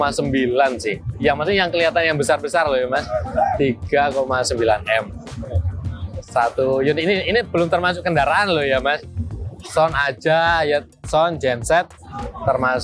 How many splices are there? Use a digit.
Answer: 0